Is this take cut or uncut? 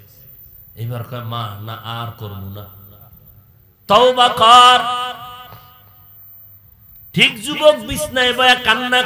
uncut